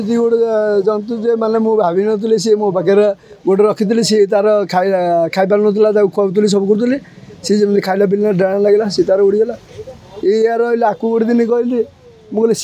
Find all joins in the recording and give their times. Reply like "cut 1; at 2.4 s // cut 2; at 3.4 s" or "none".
none